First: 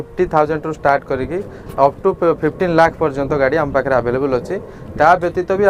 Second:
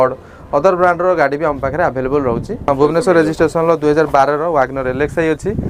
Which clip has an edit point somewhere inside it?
second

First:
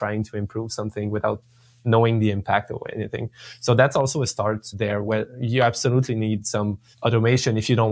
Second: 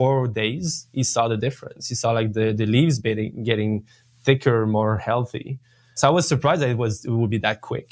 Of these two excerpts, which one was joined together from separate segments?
first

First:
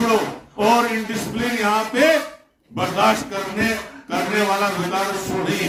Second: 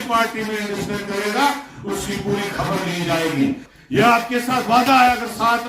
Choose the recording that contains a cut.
second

